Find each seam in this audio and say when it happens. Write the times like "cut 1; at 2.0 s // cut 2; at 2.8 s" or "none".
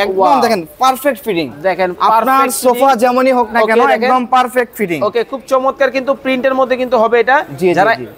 none